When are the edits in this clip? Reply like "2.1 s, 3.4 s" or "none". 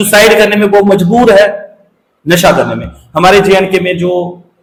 none